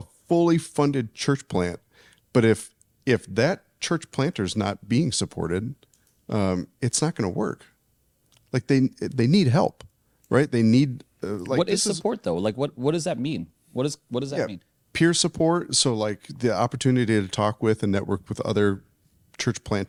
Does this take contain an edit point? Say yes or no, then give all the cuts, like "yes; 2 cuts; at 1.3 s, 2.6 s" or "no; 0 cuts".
no; 0 cuts